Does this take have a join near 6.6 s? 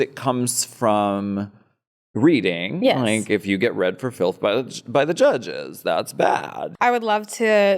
yes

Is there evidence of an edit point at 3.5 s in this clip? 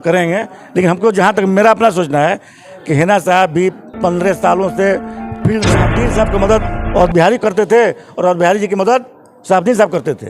no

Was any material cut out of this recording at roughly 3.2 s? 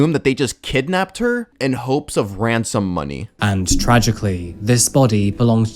yes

